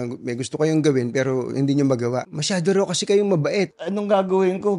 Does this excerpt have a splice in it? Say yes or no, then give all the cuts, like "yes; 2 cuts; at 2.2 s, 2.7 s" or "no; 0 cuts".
yes; 2 cuts; at 2.3 s, 3.8 s